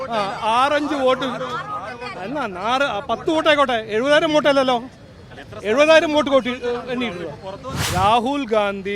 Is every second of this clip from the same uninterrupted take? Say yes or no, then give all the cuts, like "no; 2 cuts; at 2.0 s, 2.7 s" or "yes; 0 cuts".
no; 1 cut; at 7.7 s